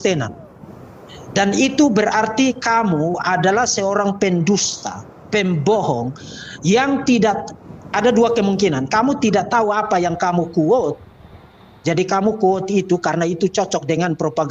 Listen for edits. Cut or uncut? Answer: uncut